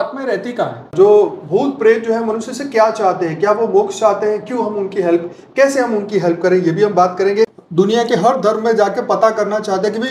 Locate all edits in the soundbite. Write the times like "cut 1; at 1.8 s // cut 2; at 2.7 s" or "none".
cut 1; at 0.9 s // cut 2; at 7.6 s